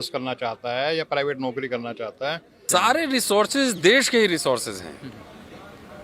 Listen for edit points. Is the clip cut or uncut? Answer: cut